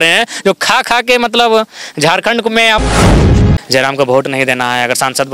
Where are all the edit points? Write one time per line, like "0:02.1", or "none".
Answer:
0:03.3